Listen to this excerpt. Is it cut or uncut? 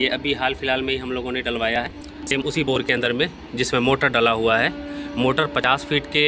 uncut